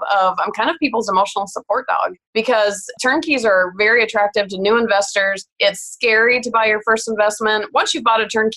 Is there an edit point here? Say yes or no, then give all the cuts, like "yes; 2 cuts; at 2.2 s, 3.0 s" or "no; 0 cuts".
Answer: yes; 3 cuts; at 2.2 s, 3.0 s, 5.4 s